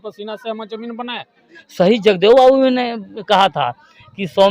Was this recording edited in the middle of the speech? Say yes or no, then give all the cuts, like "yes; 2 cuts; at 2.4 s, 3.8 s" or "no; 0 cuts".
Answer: yes; 1 cut; at 1.6 s